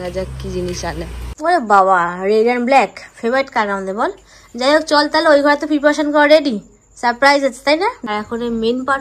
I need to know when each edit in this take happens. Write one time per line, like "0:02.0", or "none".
0:01.2
0:08.1